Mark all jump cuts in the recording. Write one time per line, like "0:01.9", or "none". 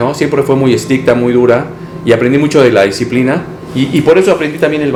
none